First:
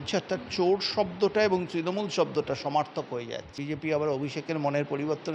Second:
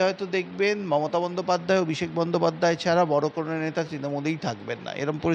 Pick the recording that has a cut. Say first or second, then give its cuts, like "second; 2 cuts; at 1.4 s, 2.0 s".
first; 1 cut; at 3.6 s